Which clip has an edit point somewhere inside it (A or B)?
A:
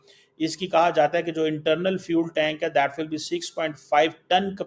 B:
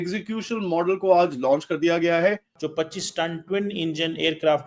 B